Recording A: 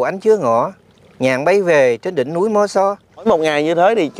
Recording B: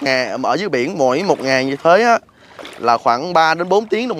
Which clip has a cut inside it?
A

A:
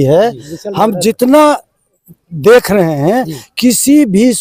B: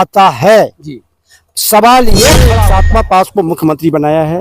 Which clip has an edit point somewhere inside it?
B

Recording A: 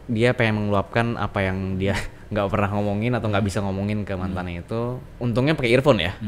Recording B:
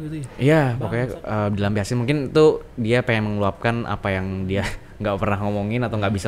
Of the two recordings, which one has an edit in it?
A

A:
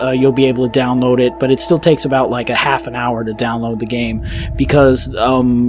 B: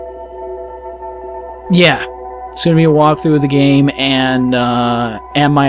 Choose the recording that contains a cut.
A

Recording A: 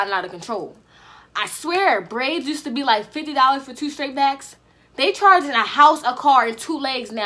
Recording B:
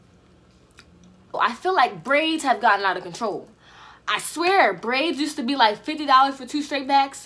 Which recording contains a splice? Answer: B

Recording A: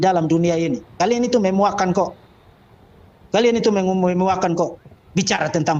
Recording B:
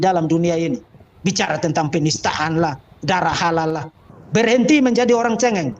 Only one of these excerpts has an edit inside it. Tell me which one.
B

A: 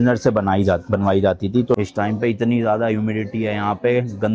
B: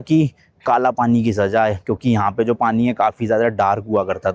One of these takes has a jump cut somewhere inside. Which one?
A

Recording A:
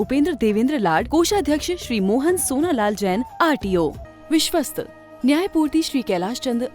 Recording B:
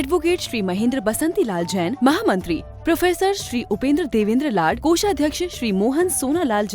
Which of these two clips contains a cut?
A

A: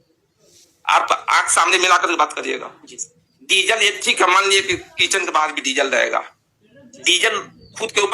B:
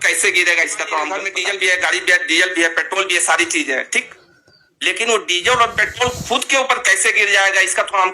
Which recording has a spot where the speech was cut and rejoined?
B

